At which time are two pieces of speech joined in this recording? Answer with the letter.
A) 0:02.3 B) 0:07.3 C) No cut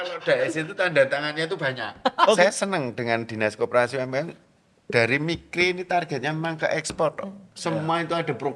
A